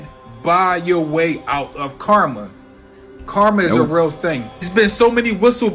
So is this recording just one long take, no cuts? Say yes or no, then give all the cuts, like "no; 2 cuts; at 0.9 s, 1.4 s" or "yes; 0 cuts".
yes; 0 cuts